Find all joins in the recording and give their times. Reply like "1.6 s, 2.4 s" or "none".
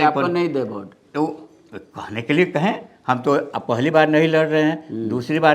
none